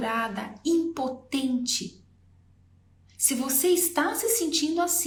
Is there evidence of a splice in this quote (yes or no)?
no